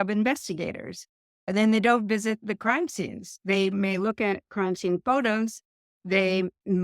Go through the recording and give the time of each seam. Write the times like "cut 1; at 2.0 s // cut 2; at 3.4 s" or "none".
cut 1; at 1.3 s